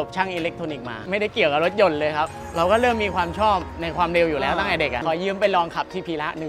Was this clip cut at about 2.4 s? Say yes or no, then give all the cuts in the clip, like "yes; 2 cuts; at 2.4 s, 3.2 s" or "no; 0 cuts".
yes; 3 cuts; at 0.9 s, 2.4 s, 5.0 s